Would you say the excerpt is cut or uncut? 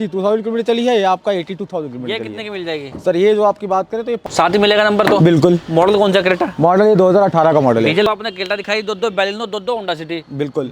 cut